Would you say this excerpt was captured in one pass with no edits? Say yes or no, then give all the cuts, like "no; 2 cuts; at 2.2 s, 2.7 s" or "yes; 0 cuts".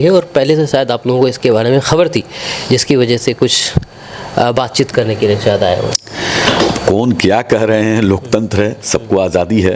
yes; 0 cuts